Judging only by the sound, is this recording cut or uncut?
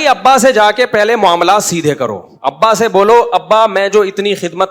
uncut